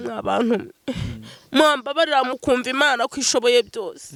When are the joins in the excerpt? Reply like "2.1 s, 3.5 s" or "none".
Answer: none